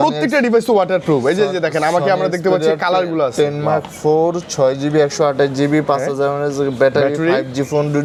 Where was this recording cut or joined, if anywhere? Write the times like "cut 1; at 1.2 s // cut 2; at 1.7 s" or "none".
none